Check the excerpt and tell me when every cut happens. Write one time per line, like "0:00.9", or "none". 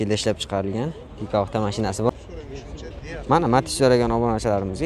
0:02.1